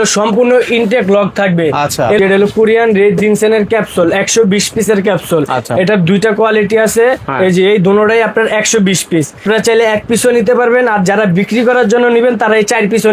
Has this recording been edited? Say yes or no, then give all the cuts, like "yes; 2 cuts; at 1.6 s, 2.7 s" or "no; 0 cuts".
yes; 2 cuts; at 2.2 s, 9.4 s